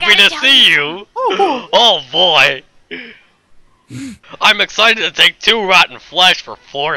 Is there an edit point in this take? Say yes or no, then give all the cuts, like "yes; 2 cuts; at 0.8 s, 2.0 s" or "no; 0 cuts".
yes; 1 cut; at 4.3 s